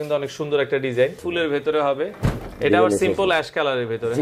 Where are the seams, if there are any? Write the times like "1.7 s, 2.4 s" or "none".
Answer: 1.2 s